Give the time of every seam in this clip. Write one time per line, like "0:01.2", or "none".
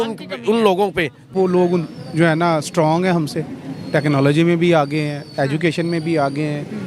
0:01.3